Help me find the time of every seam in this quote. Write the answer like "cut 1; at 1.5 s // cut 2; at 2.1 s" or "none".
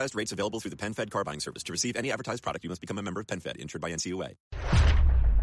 cut 1; at 4.5 s